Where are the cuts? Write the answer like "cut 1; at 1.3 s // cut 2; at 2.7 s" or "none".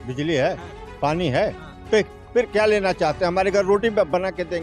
none